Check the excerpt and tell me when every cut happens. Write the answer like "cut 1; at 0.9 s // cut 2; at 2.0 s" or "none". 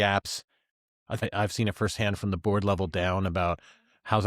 cut 1; at 1.2 s